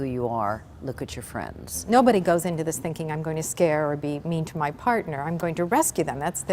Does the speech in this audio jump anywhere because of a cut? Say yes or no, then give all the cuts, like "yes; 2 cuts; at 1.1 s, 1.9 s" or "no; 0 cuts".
yes; 1 cut; at 1.8 s